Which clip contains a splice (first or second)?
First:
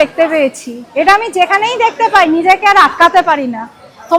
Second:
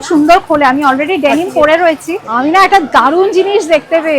second